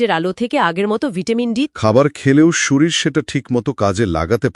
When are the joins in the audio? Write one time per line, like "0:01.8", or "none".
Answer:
0:01.7